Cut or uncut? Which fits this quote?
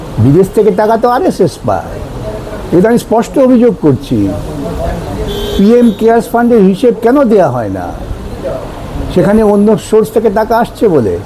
uncut